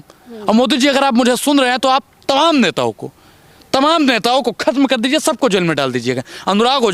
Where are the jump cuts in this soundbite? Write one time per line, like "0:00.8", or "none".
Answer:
none